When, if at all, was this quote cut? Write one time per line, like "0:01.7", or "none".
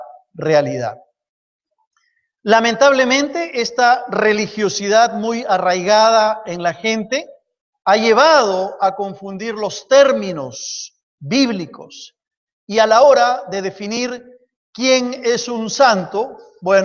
none